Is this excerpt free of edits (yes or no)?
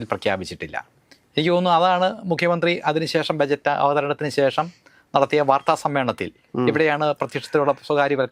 yes